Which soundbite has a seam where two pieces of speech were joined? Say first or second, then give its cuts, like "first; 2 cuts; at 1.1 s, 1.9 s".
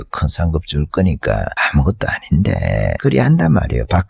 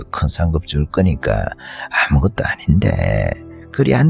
first; 2 cuts; at 1.6 s, 3.0 s